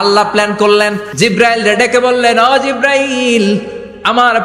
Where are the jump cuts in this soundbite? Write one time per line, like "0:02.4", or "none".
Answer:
0:01.1